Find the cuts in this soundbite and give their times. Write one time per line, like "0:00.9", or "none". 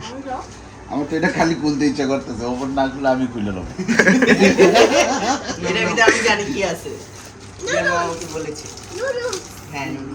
none